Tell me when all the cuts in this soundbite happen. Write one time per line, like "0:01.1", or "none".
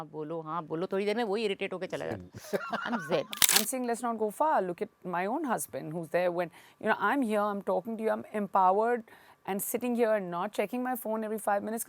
0:03.4